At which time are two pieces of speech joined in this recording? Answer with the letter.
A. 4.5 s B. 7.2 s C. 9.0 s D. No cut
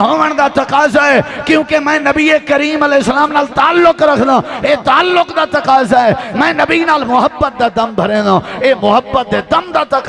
D